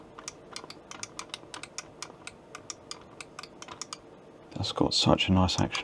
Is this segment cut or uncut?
uncut